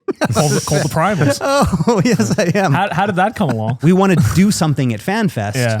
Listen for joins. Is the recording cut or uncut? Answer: cut